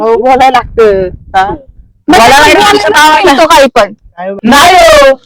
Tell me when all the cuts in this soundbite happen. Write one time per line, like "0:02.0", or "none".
0:04.4